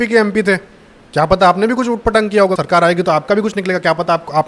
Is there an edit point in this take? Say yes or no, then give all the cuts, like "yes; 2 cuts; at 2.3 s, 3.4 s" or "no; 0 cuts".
yes; 1 cut; at 2.6 s